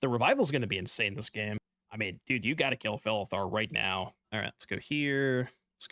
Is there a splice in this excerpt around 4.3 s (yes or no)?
yes